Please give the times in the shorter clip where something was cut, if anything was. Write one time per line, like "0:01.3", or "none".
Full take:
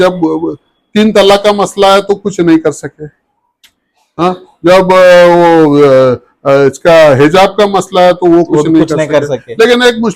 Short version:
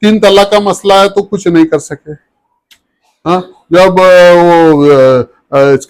none